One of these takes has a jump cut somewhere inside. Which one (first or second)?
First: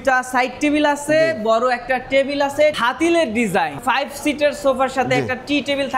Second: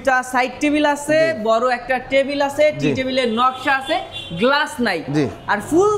first